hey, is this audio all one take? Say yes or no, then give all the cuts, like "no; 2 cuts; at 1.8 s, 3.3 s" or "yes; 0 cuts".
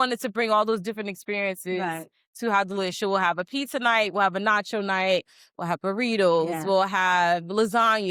yes; 0 cuts